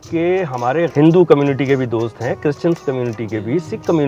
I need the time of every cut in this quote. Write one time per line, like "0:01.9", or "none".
0:00.9